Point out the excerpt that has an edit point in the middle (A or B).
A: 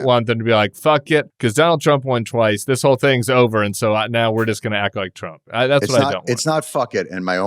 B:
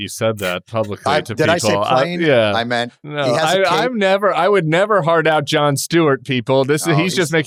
A